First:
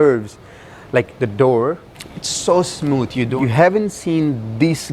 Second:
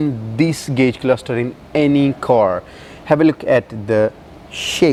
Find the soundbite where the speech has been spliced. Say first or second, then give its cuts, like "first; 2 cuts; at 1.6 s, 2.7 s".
first; 1 cut; at 3.3 s